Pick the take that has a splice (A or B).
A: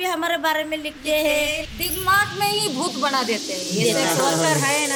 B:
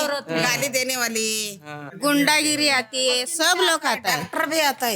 B